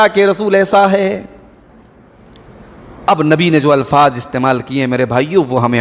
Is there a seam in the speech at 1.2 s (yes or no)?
no